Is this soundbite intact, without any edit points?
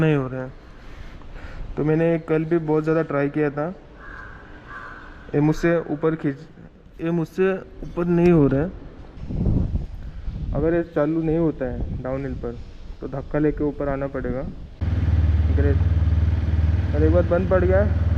no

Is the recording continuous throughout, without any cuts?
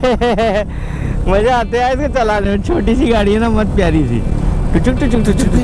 yes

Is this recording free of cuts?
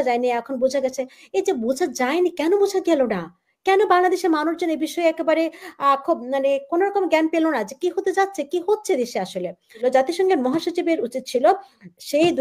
no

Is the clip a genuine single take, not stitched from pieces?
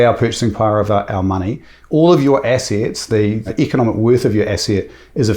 no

